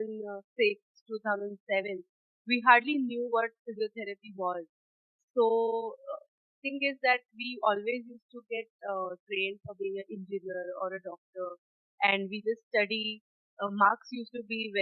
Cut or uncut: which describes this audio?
uncut